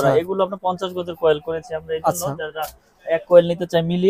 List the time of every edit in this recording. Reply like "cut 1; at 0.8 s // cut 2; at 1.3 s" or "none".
none